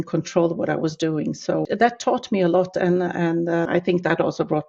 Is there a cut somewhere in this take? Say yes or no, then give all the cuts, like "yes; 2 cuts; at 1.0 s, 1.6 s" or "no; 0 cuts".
yes; 2 cuts; at 1.7 s, 3.7 s